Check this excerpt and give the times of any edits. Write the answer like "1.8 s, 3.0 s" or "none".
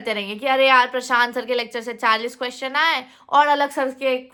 none